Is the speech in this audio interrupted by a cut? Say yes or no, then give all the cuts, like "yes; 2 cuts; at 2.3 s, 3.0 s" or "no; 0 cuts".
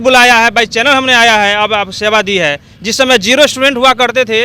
no; 0 cuts